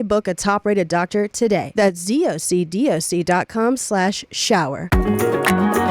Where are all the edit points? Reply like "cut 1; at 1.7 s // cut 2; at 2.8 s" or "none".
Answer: cut 1; at 1.7 s // cut 2; at 4.8 s

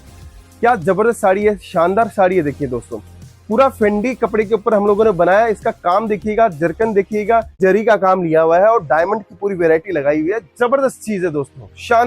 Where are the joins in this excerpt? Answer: cut 1; at 7.6 s

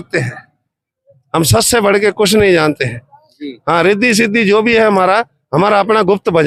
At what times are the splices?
none

